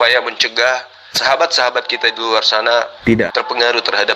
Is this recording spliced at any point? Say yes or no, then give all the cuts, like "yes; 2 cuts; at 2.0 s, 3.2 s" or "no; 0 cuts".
yes; 1 cut; at 1.2 s